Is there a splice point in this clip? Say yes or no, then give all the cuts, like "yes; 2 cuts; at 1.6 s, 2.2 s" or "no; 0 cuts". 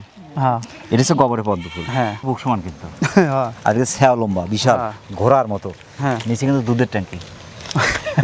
yes; 1 cut; at 2.2 s